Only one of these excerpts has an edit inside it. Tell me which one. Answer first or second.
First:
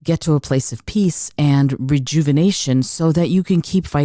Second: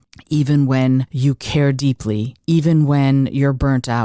second